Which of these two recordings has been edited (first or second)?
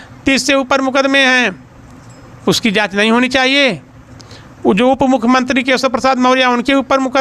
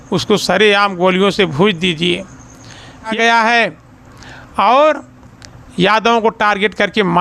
second